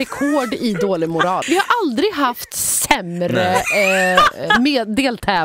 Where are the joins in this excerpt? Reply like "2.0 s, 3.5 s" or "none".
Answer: 1.4 s